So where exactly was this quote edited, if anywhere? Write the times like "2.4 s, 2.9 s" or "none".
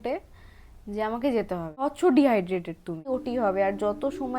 1.8 s, 3.1 s